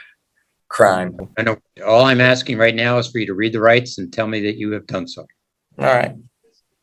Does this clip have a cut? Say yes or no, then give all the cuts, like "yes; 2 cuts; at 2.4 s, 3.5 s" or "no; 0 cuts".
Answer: no; 0 cuts